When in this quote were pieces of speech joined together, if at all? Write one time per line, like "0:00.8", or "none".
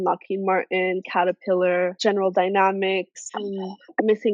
none

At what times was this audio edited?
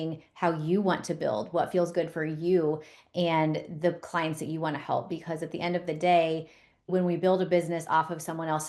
0:06.9

